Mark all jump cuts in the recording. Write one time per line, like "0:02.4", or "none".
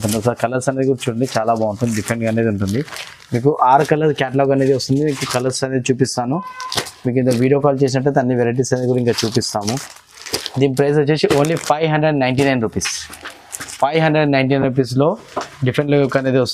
none